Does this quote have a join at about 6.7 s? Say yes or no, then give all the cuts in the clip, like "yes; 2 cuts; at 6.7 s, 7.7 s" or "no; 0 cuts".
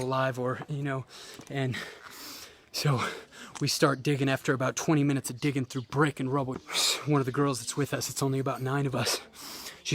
yes; 1 cut; at 6.7 s